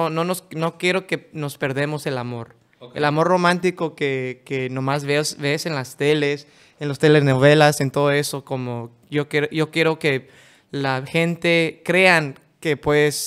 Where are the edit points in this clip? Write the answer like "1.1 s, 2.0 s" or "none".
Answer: none